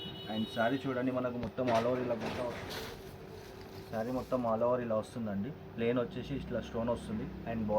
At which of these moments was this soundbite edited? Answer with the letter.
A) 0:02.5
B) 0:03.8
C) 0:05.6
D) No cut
A